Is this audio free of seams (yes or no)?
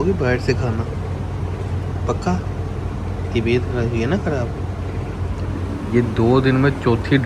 yes